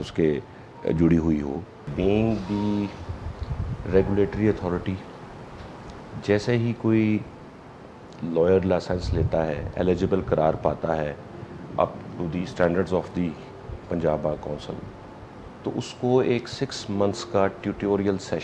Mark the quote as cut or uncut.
cut